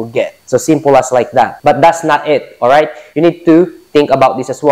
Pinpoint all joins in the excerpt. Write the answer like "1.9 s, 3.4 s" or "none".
1.5 s